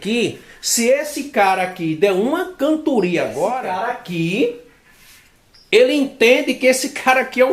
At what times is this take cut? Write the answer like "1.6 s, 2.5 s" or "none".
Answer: 3.6 s